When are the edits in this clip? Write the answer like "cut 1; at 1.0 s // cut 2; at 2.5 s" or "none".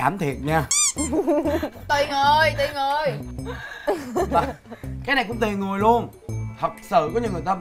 none